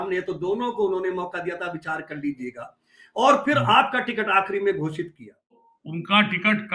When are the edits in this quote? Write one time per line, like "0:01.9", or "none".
0:05.6